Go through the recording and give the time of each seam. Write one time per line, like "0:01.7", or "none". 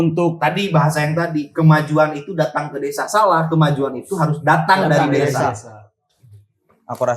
0:05.6